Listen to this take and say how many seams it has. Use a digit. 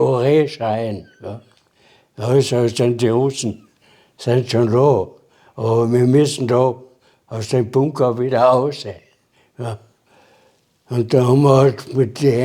0